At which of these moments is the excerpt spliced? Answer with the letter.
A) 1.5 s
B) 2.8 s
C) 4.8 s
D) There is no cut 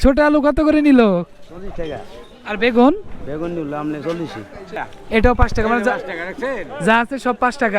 C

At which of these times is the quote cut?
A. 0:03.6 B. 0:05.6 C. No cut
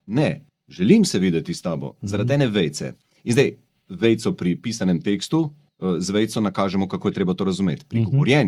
C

